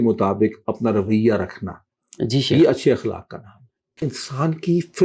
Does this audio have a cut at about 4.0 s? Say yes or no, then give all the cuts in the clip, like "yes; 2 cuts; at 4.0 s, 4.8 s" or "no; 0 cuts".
yes; 1 cut; at 4.0 s